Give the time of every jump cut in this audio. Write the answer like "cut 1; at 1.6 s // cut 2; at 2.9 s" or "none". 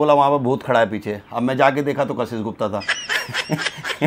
none